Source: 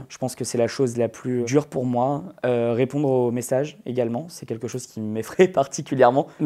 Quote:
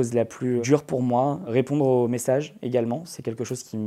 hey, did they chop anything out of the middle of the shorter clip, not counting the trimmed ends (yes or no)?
yes